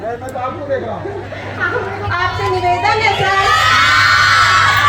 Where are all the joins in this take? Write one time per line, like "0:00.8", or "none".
0:02.0

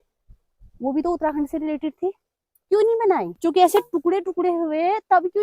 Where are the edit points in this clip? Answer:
0:03.4

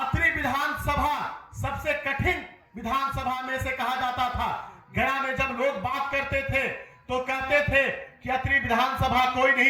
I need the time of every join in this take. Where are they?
none

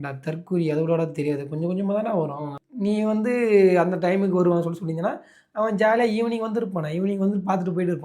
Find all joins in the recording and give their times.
0:02.5

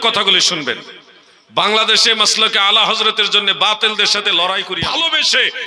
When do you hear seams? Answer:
0:04.8

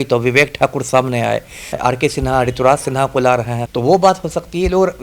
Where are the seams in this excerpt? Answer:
0:01.7
0:03.6

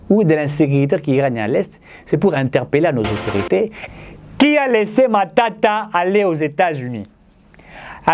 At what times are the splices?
0:03.8

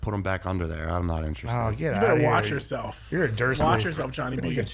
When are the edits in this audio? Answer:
none

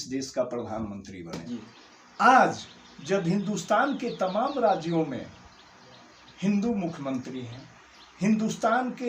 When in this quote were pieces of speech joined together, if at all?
0:01.4

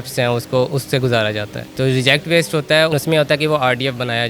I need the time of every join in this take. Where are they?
0:01.7
0:03.0

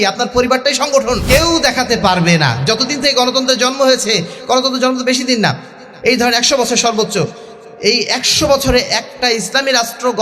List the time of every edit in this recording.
0:01.2

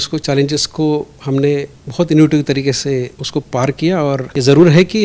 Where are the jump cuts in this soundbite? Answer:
0:03.2
0:04.3

